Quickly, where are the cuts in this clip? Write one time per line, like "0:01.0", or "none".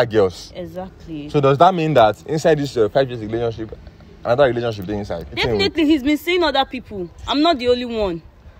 0:05.4